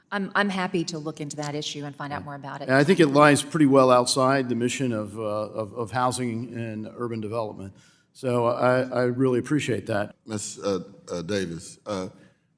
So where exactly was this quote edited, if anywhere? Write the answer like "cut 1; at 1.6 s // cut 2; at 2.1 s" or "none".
none